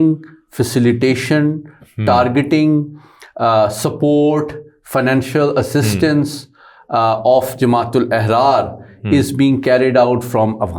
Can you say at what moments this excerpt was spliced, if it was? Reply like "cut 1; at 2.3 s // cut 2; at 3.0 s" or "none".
none